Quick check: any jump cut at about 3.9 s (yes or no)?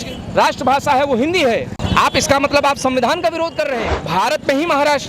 yes